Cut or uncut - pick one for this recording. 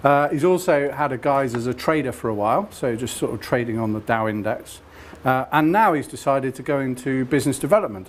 uncut